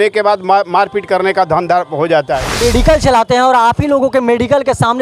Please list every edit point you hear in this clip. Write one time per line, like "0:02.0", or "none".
0:02.4